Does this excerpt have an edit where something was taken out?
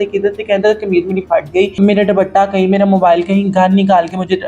yes; 1 cut; at 1.8 s

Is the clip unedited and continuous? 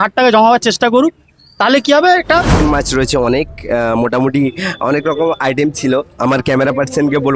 no; 1 cut; at 2.6 s

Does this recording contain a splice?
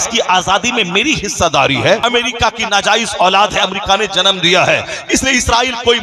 yes; 1 cut; at 2.0 s

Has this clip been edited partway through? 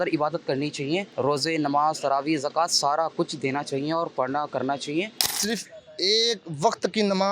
yes; 2 cuts; at 1.1 s, 5.4 s

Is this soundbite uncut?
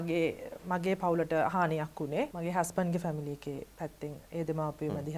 no; 1 cut; at 2.3 s

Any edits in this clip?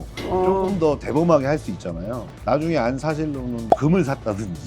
yes; 1 cut; at 3.6 s

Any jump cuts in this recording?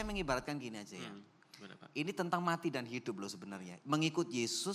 no; 0 cuts

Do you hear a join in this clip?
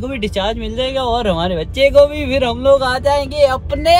no; 0 cuts

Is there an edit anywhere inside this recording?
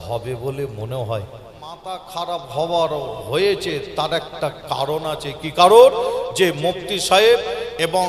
yes; 1 cut; at 1.9 s

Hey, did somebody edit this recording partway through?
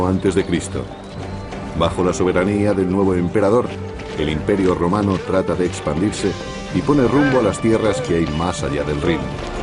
no; 0 cuts

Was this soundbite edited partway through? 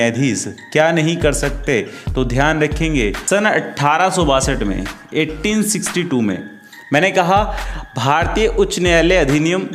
yes; 1 cut; at 3.2 s

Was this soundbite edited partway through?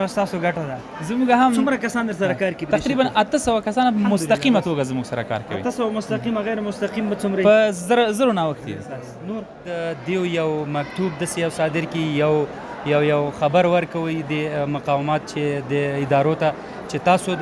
yes; 1 cut; at 9.7 s

